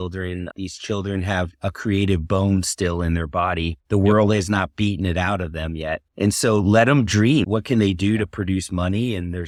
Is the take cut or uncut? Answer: uncut